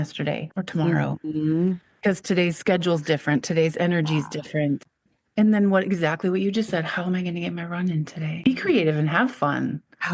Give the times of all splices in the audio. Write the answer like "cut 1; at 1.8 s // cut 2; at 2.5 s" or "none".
cut 1; at 4.9 s // cut 2; at 8.4 s